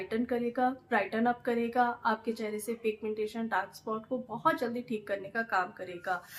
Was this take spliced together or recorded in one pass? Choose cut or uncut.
uncut